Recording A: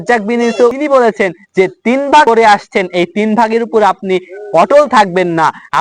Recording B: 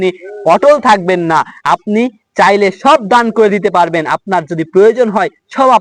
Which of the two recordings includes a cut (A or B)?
A